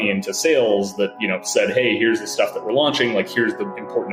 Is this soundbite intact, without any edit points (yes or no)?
yes